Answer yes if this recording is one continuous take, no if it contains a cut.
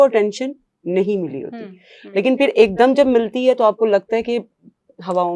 yes